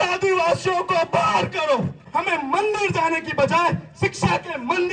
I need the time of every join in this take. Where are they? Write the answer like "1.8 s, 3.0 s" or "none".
2.0 s